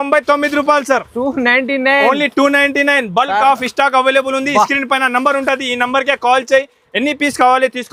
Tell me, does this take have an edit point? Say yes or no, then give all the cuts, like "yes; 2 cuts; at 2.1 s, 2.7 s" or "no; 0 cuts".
no; 0 cuts